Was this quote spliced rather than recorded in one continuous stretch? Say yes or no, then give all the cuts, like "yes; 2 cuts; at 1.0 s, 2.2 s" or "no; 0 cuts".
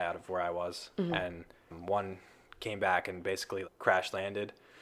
yes; 1 cut; at 3.7 s